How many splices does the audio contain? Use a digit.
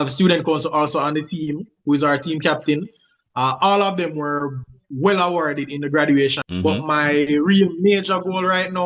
1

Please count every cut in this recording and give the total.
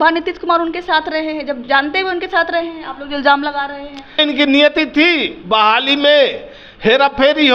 2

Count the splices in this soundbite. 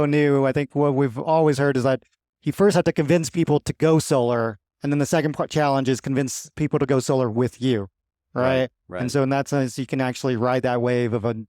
0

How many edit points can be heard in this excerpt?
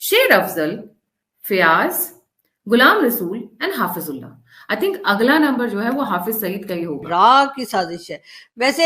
1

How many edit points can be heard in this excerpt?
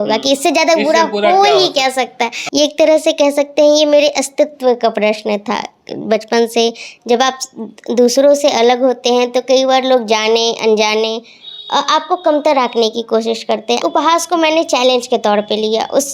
2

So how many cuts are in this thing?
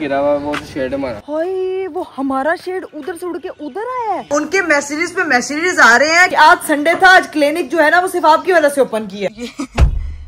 3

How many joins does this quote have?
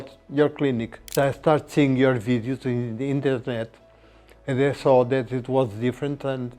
1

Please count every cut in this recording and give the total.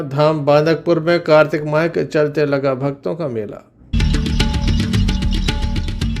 1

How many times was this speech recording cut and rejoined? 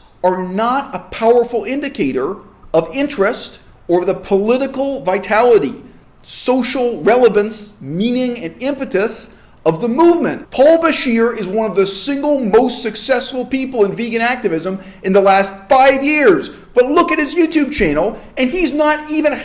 1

